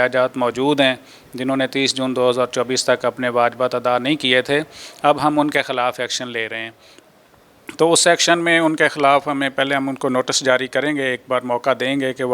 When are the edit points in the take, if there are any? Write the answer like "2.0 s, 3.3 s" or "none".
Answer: none